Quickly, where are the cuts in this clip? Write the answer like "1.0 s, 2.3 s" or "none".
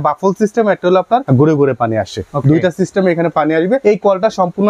1.2 s, 3.8 s